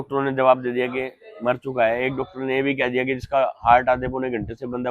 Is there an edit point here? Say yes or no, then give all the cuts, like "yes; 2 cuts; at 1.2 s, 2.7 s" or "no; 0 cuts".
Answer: no; 0 cuts